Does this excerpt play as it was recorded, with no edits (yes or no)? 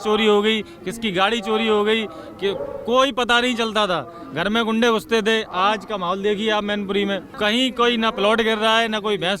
no